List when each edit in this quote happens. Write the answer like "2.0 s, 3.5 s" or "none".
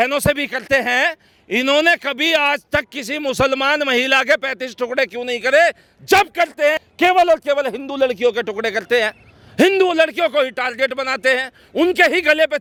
none